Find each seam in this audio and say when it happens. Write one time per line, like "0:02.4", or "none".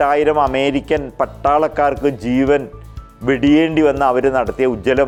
none